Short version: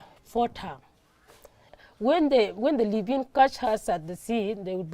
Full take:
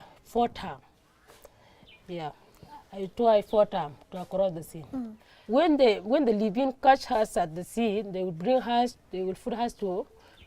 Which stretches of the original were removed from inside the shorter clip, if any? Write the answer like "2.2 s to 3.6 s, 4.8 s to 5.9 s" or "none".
1.8 s to 5.3 s